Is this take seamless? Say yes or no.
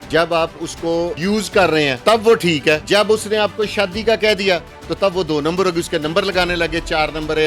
no